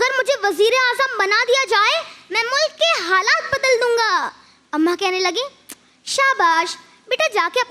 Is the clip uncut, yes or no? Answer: yes